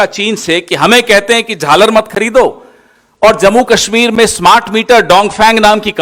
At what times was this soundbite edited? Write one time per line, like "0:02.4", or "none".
none